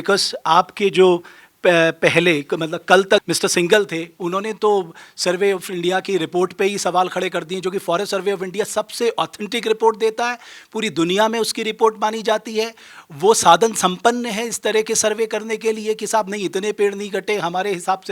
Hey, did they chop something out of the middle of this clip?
yes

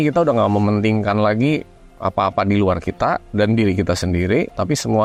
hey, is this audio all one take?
yes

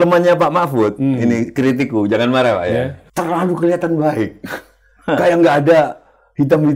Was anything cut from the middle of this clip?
yes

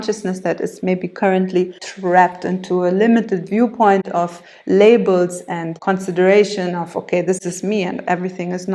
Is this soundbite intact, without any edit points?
no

